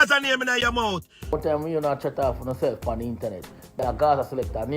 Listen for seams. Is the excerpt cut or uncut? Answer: cut